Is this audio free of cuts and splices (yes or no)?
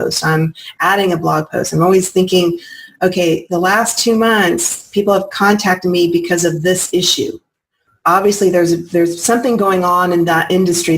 no